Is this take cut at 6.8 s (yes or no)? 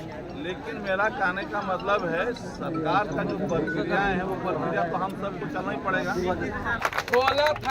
yes